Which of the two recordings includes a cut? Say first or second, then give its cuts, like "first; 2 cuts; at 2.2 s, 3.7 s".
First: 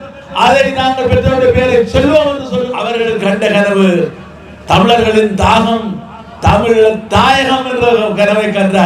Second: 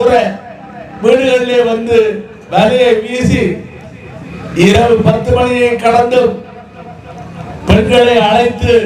first; 1 cut; at 2.8 s